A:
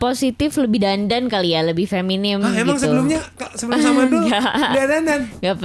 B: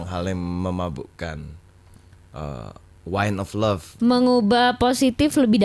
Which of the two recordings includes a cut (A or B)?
B